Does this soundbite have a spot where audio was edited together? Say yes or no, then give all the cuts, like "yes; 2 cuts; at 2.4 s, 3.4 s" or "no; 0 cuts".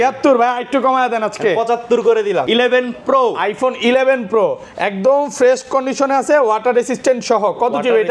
yes; 1 cut; at 2.4 s